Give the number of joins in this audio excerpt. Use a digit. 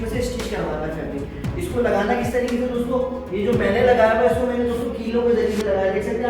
0